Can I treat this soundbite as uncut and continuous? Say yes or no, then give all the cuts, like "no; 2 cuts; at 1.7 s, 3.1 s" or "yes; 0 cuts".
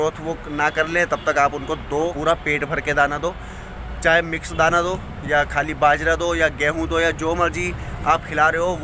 no; 1 cut; at 2.1 s